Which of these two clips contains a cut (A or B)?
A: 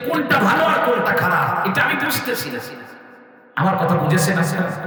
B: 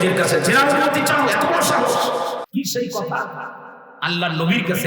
B